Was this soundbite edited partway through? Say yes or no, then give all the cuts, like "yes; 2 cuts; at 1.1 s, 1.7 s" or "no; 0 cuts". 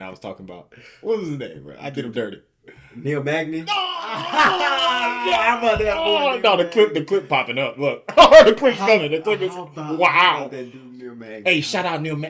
no; 0 cuts